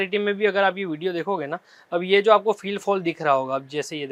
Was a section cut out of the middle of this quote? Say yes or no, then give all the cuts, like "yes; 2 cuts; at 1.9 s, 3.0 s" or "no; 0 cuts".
no; 0 cuts